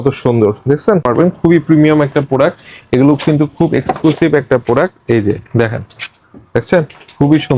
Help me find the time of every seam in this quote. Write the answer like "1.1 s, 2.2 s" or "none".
1.1 s